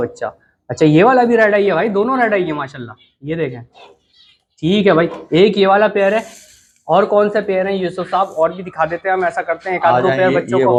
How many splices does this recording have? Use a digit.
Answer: 0